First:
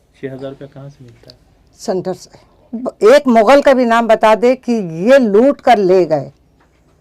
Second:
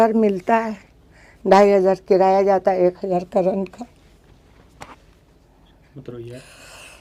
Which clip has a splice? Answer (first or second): first